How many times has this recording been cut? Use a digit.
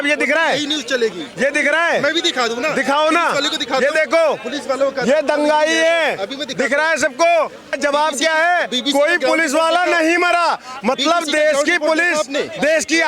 1